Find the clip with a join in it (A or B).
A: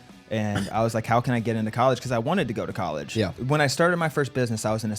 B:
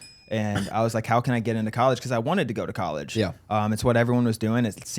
A